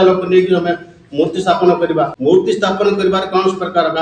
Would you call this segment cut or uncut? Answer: cut